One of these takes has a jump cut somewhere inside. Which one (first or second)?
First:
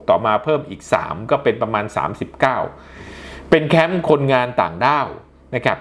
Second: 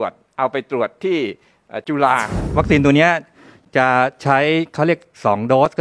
second